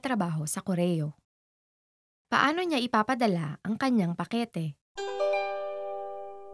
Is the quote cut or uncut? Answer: cut